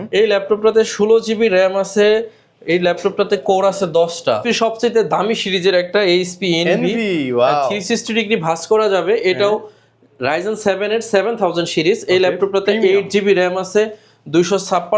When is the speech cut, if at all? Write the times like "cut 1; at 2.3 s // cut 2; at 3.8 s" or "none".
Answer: cut 1; at 4.4 s